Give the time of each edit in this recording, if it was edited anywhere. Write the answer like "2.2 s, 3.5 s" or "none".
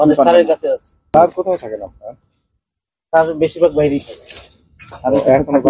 1.1 s